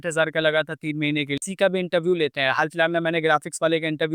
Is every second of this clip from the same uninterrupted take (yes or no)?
no